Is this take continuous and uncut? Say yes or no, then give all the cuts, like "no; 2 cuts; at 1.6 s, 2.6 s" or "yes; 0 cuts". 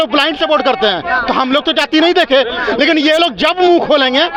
yes; 0 cuts